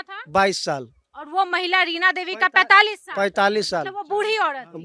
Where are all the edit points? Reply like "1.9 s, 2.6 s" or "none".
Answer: none